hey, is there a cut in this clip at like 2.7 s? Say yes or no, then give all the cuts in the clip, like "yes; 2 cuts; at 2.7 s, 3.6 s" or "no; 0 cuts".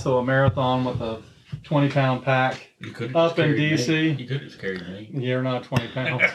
yes; 1 cut; at 2.7 s